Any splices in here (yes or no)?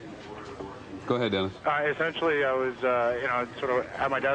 yes